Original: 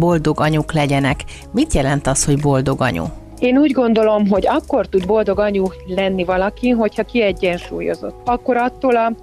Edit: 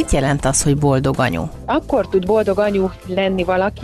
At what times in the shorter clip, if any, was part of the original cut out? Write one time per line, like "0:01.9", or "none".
0:01.7